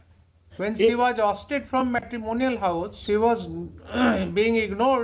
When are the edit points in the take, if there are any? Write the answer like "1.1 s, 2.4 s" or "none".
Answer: 3.0 s